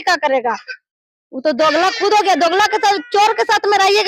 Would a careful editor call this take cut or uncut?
uncut